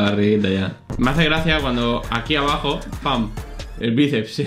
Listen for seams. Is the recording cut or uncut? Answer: cut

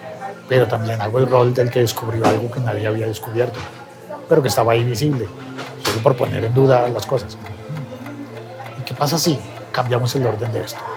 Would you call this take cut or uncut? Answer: uncut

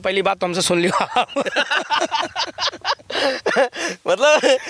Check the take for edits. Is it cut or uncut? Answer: uncut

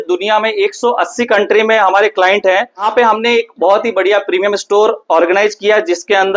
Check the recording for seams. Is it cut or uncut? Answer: cut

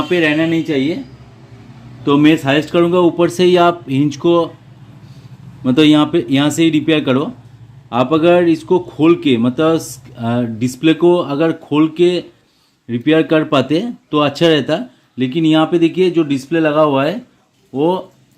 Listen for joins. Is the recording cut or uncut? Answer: uncut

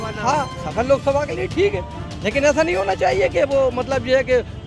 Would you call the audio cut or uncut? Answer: uncut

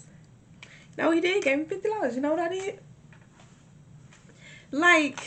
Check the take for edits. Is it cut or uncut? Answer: uncut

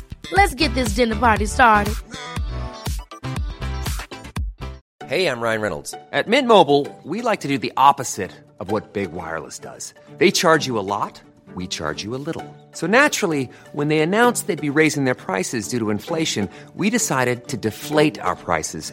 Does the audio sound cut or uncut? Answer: cut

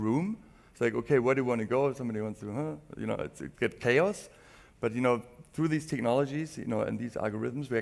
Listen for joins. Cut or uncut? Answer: cut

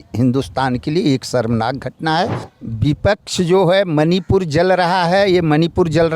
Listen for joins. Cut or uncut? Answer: cut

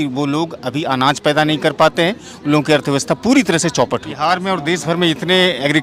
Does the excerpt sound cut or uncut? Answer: cut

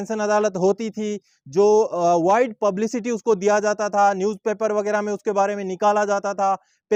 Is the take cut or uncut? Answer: uncut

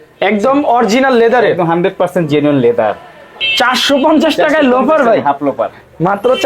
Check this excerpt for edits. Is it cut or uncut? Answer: cut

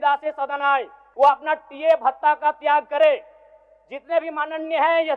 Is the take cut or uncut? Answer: cut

